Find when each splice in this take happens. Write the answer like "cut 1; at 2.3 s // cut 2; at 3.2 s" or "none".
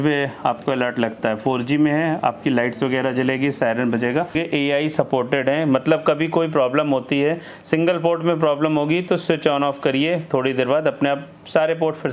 cut 1; at 4.4 s